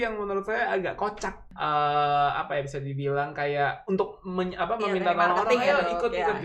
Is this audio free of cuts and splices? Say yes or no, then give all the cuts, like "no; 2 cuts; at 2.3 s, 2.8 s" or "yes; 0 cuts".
no; 1 cut; at 1.4 s